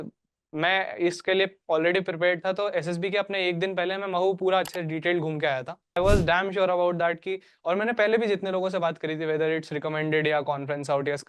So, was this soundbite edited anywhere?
yes; 1 cut; at 6.0 s

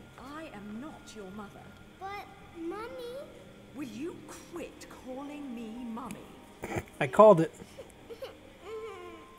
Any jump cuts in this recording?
no; 0 cuts

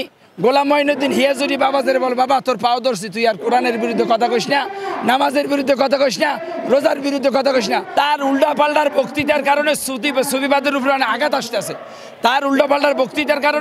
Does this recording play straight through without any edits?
no; 1 cut; at 7.9 s

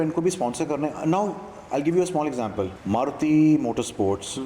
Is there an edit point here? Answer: yes; 1 cut; at 2.8 s

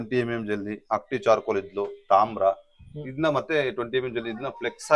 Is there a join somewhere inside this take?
no; 0 cuts

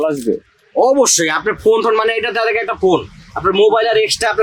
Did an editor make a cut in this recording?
no; 0 cuts

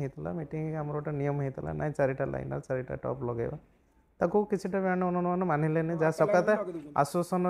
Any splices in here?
no; 0 cuts

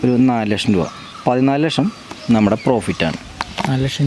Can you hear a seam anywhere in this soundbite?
yes; 1 cut; at 1.0 s

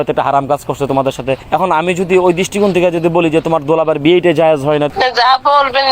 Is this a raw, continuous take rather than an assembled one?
no; 2 cuts; at 1.4 s, 4.9 s

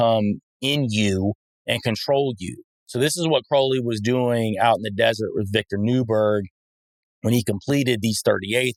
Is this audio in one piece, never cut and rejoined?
yes; 0 cuts

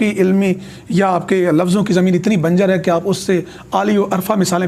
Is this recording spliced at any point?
no; 0 cuts

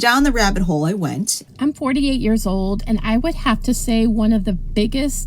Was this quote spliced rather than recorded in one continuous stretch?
yes; 1 cut; at 1.4 s

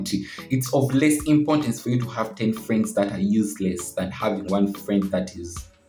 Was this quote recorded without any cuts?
yes; 0 cuts

